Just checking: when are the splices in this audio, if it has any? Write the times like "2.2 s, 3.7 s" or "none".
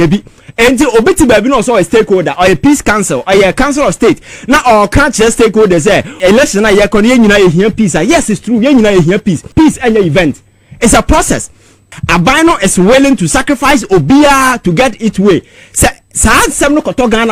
6.1 s, 9.5 s, 11.9 s